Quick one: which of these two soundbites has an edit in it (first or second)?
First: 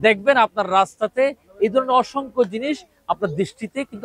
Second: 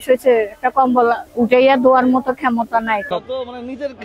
second